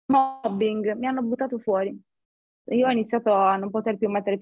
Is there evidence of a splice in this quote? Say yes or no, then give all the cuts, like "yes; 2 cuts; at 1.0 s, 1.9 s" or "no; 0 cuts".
no; 0 cuts